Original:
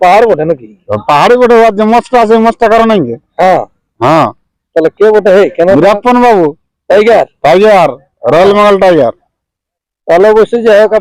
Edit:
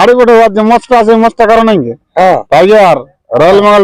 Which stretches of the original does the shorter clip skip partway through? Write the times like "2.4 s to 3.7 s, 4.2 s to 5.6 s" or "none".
3.7 s to 7.4 s